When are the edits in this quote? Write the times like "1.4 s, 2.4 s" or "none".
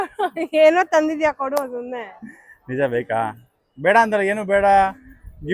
none